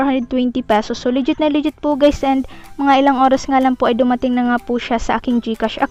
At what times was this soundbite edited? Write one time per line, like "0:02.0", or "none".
none